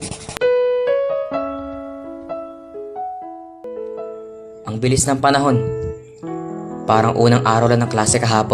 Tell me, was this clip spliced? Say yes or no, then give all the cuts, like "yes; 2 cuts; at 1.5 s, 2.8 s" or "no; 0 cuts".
yes; 1 cut; at 3.7 s